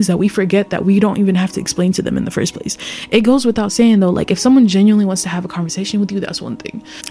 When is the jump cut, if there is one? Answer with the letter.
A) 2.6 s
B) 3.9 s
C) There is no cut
C